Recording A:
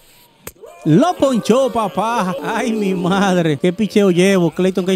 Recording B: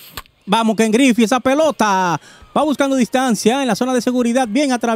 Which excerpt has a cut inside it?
A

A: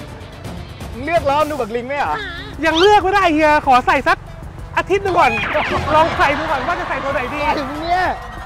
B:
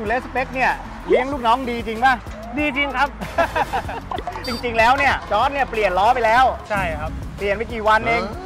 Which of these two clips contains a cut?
B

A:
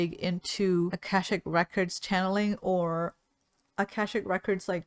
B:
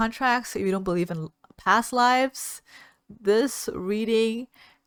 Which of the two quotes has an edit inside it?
A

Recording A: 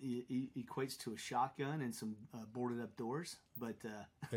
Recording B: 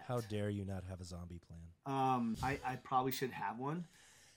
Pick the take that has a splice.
B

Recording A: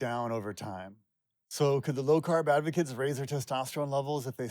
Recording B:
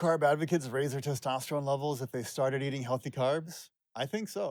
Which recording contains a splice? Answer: A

